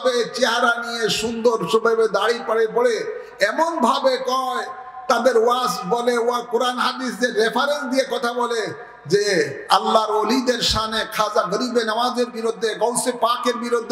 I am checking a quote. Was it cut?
no; 0 cuts

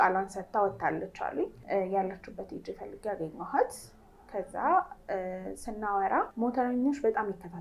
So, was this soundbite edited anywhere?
yes; 2 cuts; at 1.6 s, 6.3 s

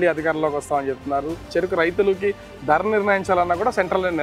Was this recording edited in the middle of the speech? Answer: yes; 1 cut; at 1.4 s

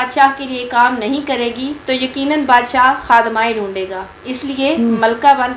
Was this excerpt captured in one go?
yes; 0 cuts

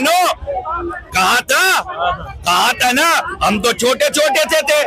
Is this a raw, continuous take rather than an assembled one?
yes; 0 cuts

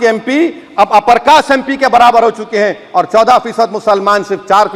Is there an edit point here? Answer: no; 0 cuts

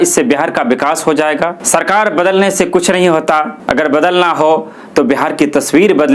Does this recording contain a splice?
yes; 1 cut; at 1.6 s

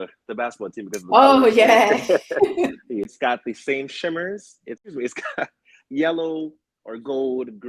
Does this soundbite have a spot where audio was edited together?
yes; 2 cuts; at 3.1 s, 4.9 s

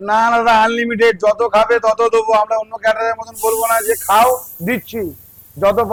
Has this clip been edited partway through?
no; 0 cuts

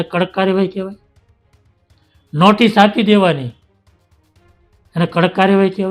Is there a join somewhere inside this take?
no; 0 cuts

